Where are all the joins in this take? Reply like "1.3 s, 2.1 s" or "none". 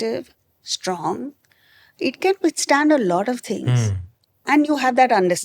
4.4 s